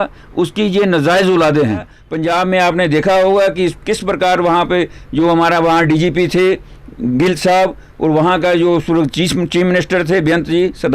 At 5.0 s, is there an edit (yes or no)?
no